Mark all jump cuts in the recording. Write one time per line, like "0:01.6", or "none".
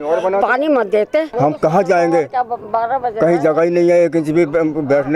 0:01.3